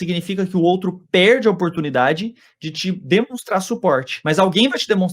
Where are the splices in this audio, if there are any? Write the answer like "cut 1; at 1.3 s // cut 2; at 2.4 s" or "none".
cut 1; at 4.1 s